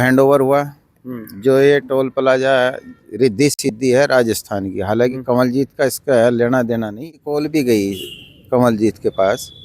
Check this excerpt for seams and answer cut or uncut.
cut